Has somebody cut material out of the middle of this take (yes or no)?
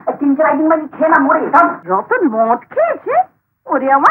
yes